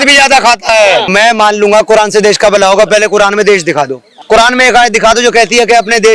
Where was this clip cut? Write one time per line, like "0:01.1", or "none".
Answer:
0:01.1
0:04.1